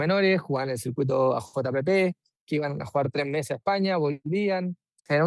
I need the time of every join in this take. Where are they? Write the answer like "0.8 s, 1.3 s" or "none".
2.3 s, 4.4 s